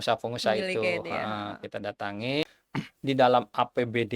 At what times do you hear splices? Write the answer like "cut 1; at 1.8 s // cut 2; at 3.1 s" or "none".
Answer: cut 1; at 2.6 s